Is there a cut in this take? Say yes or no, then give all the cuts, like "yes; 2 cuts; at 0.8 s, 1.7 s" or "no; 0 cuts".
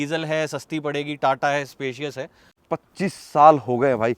yes; 1 cut; at 2.5 s